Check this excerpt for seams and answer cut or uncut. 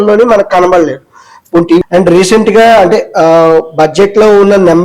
cut